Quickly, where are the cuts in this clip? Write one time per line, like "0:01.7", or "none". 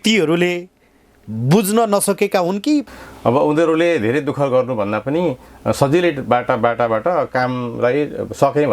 0:02.9